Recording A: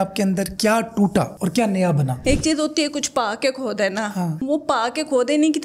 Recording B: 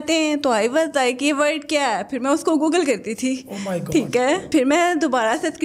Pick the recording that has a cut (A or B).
A